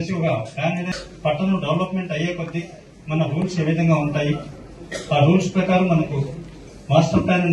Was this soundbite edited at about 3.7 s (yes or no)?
no